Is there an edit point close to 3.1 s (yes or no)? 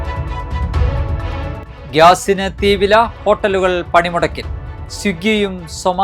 no